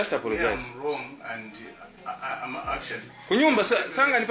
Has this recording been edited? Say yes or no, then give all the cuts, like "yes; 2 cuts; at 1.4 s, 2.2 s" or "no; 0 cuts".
no; 0 cuts